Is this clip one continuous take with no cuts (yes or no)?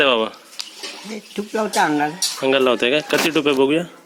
yes